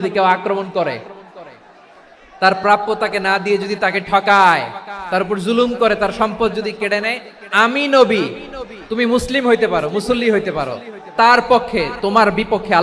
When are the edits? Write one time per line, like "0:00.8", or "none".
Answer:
none